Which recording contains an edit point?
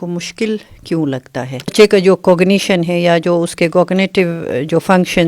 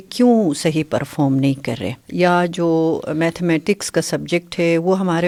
first; 1 cut; at 1.7 s

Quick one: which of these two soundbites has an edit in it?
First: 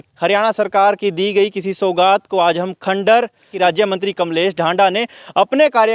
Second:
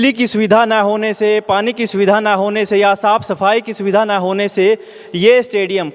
first; 1 cut; at 3.5 s

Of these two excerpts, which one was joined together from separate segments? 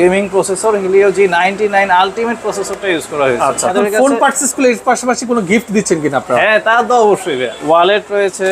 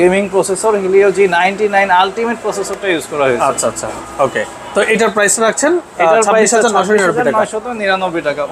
first; 2 cuts; at 3.7 s, 7.5 s

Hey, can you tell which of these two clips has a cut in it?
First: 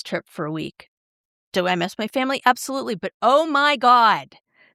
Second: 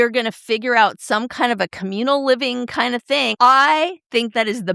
second; 1 cut; at 3.3 s

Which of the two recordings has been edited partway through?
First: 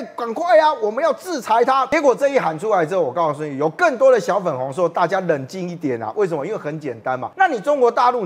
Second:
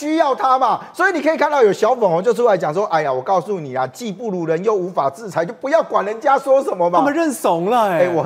first; 2 cuts; at 1.9 s, 7.3 s

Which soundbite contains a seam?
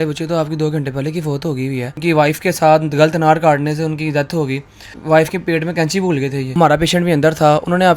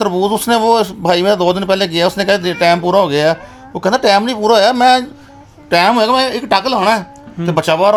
first; 3 cuts; at 2.0 s, 5.0 s, 6.5 s

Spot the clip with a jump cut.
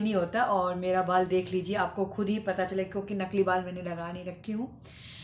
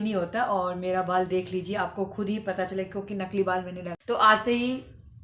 second; 1 cut; at 3.9 s

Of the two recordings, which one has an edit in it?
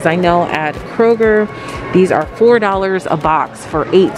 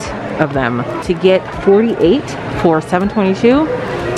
second; 1 cut; at 1.0 s

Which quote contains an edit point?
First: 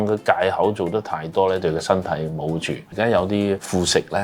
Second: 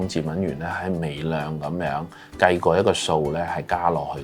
first; 1 cut; at 2.8 s

